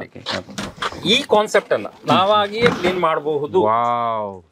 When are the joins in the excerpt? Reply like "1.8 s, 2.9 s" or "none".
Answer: none